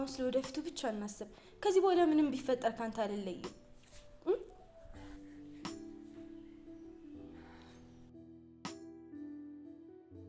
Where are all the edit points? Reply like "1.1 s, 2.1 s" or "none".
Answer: none